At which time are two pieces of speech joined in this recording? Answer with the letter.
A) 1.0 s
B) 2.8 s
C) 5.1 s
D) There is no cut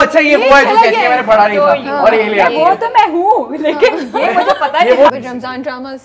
C